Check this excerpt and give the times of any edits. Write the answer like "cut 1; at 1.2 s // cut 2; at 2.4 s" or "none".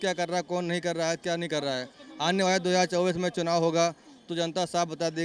none